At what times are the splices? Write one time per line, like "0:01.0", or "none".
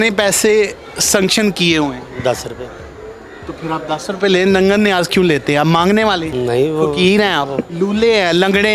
0:06.2
0:07.7